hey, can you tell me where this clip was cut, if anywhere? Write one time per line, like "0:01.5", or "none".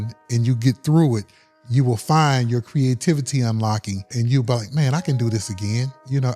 0:04.1

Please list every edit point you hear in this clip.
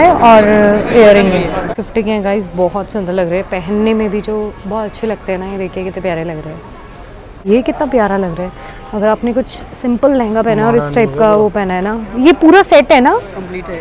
0:01.7
0:07.4

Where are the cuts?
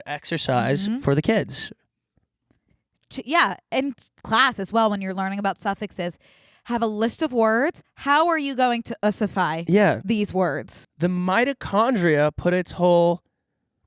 0:10.7

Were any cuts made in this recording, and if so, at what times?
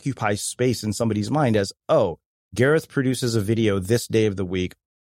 none

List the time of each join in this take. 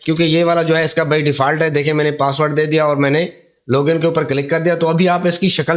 none

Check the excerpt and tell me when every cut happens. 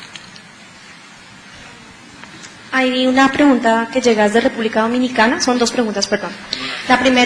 0:01.3

